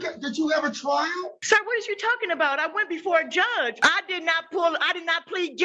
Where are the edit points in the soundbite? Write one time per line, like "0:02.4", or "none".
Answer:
0:01.4
0:03.8